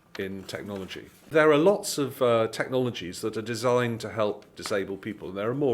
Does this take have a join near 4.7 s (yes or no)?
no